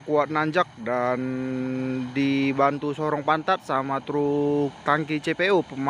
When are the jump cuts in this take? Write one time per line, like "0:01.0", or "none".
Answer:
none